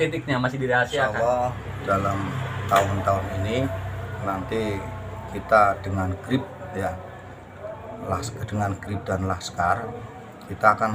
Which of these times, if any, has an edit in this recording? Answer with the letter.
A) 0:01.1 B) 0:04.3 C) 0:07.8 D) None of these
A